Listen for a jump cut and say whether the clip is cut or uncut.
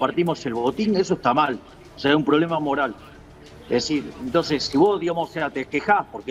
uncut